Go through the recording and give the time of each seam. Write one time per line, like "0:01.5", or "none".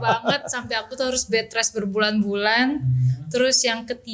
none